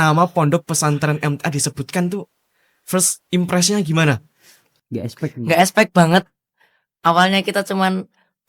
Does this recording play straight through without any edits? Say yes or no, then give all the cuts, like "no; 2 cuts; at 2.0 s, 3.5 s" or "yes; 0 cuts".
no; 1 cut; at 4.8 s